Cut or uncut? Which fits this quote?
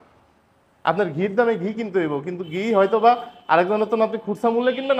uncut